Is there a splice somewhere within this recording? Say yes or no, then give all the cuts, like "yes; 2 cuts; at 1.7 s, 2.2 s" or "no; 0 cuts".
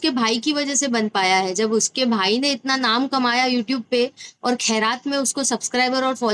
no; 0 cuts